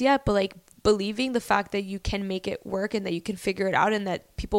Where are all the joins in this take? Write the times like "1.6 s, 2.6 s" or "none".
none